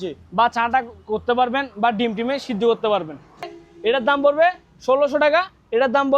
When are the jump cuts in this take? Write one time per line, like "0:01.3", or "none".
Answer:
0:03.5